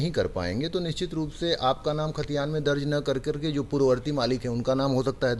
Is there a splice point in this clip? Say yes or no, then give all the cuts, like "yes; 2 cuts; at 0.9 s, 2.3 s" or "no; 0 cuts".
no; 0 cuts